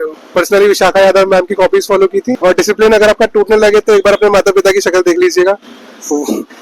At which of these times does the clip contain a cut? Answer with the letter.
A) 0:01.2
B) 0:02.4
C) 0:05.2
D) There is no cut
B